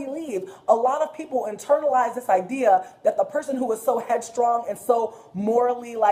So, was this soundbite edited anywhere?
yes; 1 cut; at 4.7 s

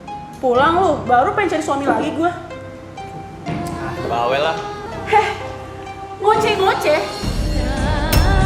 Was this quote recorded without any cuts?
no; 1 cut; at 4.8 s

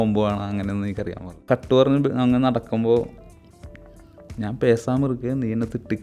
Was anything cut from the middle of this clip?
yes; 1 cut; at 1.4 s

